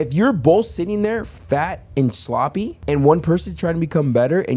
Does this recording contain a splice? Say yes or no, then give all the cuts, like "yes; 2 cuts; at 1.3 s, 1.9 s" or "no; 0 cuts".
yes; 1 cut; at 2.8 s